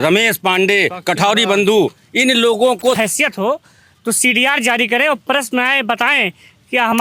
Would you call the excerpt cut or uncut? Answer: cut